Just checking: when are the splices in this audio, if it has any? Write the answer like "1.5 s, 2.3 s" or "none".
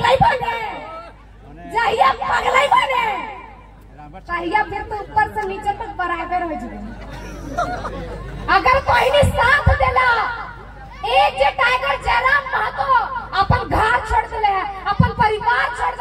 none